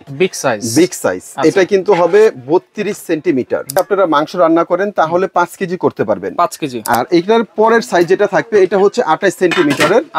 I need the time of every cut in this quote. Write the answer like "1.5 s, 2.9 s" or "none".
3.8 s, 6.9 s